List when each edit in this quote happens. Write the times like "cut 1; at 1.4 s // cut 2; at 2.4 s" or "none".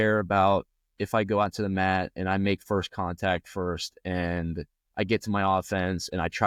none